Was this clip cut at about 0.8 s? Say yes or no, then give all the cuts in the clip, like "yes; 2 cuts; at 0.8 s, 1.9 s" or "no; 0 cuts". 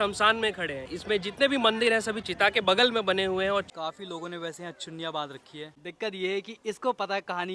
yes; 3 cuts; at 0.8 s, 3.7 s, 5.8 s